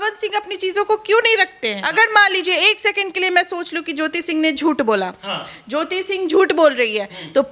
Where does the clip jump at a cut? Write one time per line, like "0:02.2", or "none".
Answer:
0:01.8